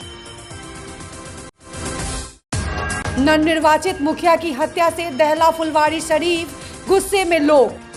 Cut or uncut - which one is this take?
uncut